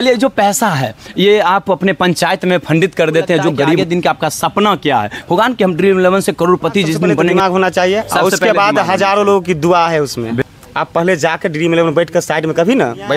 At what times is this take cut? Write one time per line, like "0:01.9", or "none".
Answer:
0:03.8
0:07.3
0:10.4